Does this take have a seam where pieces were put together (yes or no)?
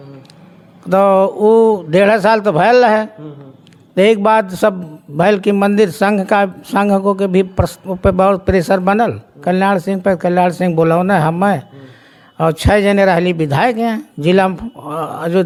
no